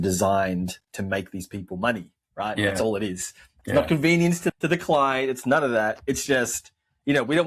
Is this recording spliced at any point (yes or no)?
yes